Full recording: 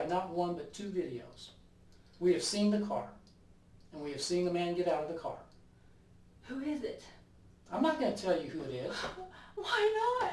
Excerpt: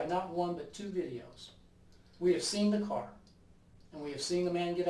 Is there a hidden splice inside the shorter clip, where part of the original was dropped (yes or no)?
no